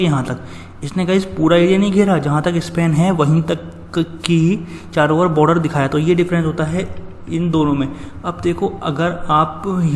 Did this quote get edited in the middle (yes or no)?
no